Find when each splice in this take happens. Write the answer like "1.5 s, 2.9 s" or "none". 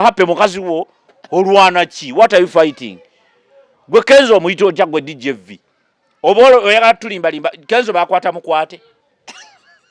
none